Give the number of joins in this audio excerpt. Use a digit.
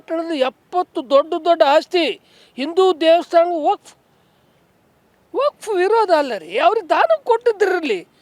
0